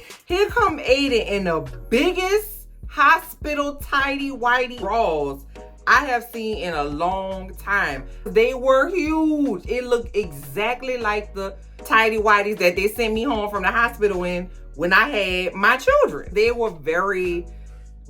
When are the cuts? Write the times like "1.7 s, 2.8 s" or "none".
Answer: 4.7 s, 8.3 s, 16.2 s